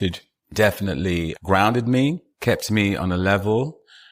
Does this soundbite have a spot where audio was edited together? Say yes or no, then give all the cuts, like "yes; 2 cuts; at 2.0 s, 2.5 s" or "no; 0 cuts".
yes; 1 cut; at 1.3 s